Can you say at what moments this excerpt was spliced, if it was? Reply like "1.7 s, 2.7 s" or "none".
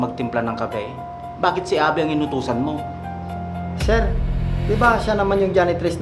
none